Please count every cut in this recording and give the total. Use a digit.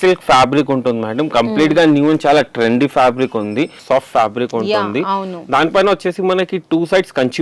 1